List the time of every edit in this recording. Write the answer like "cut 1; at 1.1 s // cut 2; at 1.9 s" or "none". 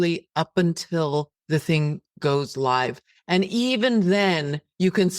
cut 1; at 1.4 s